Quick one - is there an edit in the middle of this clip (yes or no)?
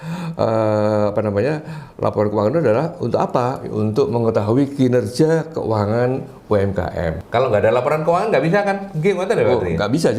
yes